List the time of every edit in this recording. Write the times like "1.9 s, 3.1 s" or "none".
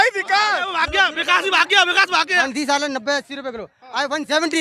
2.3 s